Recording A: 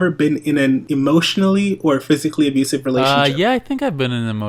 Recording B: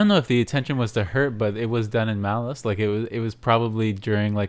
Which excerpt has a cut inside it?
A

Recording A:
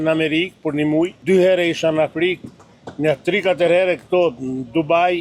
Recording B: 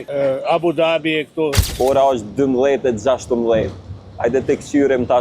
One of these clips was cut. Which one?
B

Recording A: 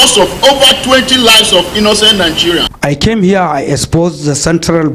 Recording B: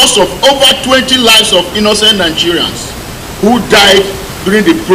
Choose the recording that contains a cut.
A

